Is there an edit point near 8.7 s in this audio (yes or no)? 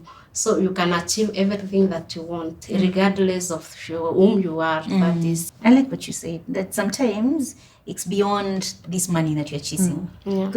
no